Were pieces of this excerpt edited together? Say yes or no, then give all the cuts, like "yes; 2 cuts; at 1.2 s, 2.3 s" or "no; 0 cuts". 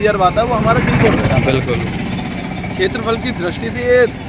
no; 0 cuts